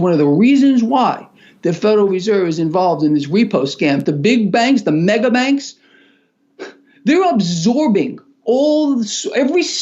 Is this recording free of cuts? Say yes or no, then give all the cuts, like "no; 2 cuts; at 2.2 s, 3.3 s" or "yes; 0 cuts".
no; 1 cut; at 4.1 s